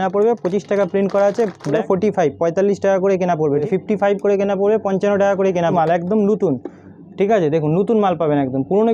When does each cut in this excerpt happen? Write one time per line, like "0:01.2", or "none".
0:01.8
0:03.6
0:05.7